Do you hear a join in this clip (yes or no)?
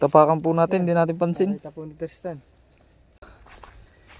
yes